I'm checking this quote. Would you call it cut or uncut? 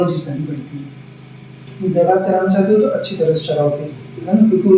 cut